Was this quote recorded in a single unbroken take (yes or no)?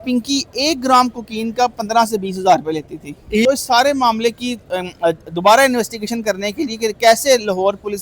no